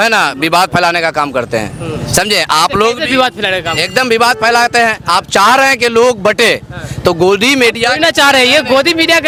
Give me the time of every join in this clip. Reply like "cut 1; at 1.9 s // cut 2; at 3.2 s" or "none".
none